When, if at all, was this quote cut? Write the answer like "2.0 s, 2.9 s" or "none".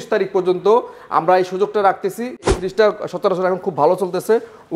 2.5 s